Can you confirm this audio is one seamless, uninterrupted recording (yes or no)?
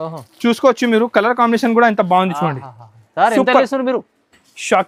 yes